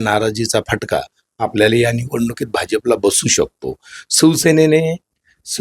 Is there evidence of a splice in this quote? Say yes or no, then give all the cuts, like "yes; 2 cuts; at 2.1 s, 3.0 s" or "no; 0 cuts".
no; 0 cuts